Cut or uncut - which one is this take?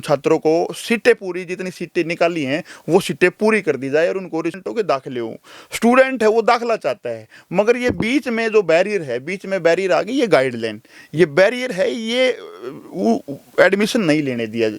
cut